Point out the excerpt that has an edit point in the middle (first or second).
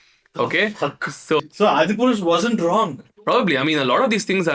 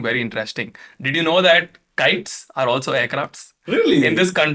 first